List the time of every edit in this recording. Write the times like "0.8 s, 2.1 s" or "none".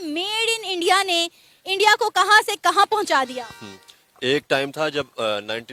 none